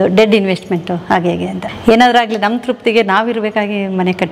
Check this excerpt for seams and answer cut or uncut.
cut